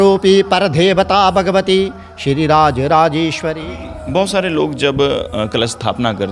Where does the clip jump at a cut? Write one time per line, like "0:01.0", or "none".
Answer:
0:03.5